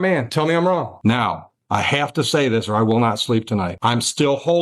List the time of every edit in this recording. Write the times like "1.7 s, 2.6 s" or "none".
0.9 s, 3.7 s